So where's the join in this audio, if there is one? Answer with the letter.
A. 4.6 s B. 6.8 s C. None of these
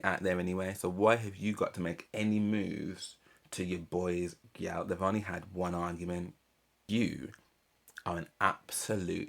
B